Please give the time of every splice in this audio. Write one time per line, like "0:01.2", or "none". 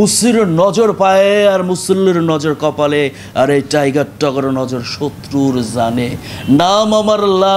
none